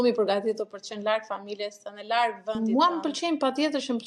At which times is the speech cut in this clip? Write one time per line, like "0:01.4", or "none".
0:02.6